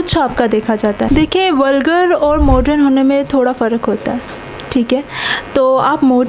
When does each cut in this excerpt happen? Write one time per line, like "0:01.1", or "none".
0:01.1